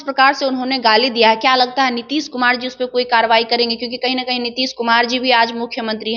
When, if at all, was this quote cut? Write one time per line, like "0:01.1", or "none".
none

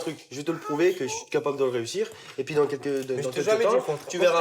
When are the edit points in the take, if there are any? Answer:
none

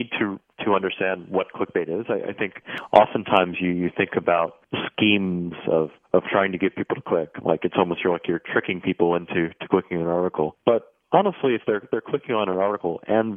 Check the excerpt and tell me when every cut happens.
0:02.7
0:10.6

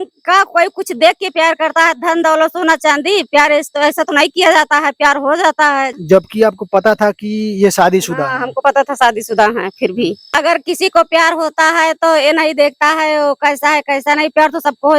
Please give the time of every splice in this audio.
0:06.0
0:10.3

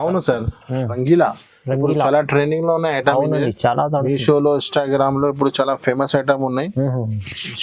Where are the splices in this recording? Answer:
0:01.0

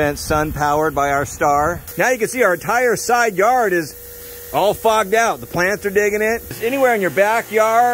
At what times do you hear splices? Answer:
0:01.8
0:06.6

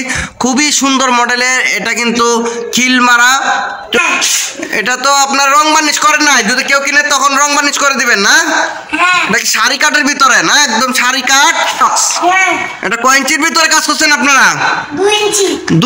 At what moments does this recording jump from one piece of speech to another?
0:04.0
0:11.8

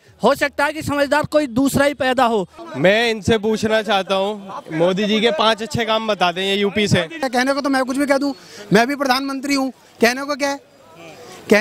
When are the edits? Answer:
0:02.6
0:07.2

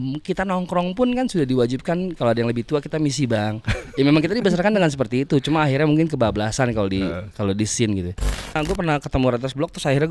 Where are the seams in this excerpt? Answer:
0:08.6

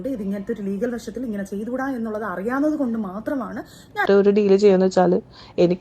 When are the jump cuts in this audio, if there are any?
0:04.0

